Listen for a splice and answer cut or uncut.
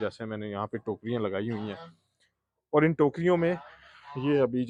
uncut